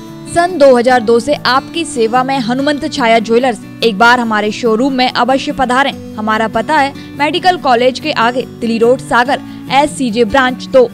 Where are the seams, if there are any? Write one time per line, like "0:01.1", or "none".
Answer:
none